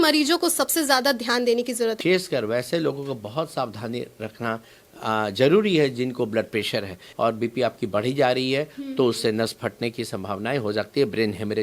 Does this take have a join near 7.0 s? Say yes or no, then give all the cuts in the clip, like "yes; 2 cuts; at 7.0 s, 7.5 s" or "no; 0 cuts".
yes; 2 cuts; at 2.0 s, 7.0 s